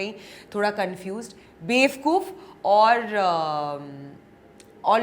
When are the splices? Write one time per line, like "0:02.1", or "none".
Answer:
none